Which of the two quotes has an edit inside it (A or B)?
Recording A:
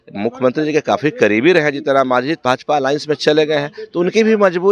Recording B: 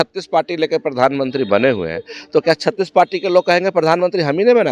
A